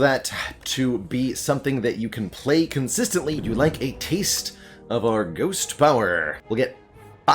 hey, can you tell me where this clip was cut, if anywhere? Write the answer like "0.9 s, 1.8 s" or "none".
3.4 s, 6.3 s